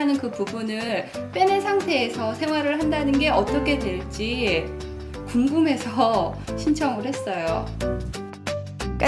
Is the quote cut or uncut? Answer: cut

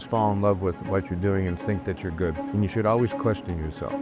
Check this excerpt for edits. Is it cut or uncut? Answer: cut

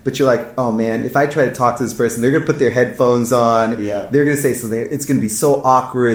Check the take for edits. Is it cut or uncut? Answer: uncut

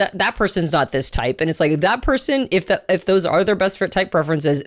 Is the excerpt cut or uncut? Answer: uncut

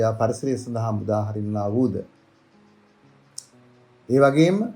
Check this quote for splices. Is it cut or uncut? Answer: uncut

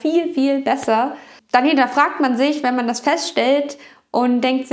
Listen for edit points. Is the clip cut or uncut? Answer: cut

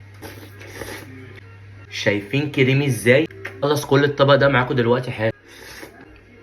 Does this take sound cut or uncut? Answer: cut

